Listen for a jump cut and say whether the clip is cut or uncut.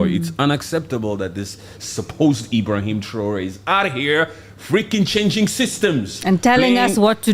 uncut